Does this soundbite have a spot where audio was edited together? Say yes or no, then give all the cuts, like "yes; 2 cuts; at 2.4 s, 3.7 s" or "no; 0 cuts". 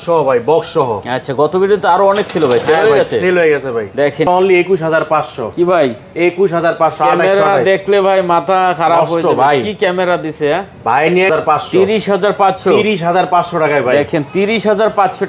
yes; 2 cuts; at 4.3 s, 11.3 s